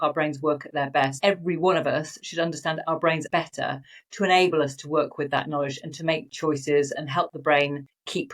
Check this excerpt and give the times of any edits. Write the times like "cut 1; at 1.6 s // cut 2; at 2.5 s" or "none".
cut 1; at 1.2 s // cut 2; at 3.2 s